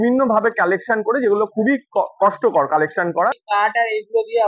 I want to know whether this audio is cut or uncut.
cut